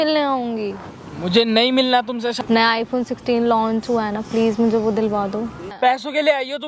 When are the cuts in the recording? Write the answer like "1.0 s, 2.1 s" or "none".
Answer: 2.3 s, 5.7 s